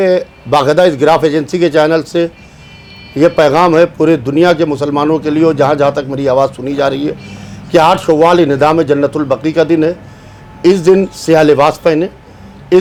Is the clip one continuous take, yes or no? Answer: yes